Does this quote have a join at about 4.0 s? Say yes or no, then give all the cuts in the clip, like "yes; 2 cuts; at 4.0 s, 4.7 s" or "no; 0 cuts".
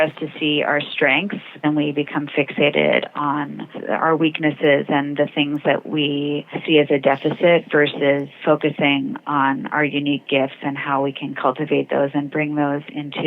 no; 3 cuts; at 1.6 s, 6.5 s, 8.3 s